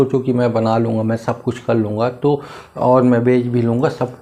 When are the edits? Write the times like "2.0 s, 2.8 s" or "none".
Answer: none